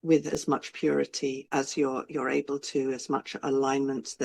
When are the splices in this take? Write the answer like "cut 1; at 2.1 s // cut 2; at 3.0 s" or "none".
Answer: cut 1; at 1.4 s